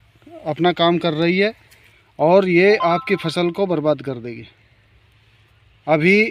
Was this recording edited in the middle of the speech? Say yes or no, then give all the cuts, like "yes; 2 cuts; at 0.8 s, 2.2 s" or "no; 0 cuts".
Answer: no; 0 cuts